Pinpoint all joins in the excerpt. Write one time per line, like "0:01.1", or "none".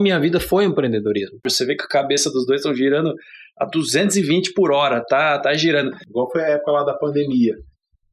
0:01.5
0:06.0